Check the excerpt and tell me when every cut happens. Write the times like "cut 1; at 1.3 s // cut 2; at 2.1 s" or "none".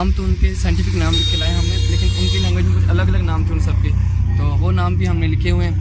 none